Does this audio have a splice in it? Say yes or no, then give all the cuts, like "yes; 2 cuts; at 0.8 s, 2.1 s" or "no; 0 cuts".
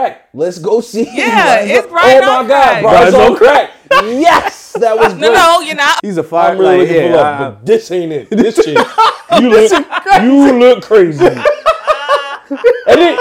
yes; 1 cut; at 5.9 s